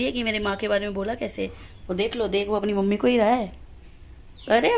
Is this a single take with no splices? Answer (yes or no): yes